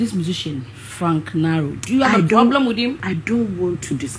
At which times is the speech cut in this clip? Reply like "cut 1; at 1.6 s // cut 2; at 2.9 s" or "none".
cut 1; at 3.0 s